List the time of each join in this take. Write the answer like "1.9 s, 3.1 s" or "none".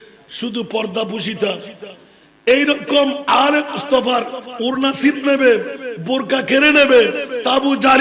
4.4 s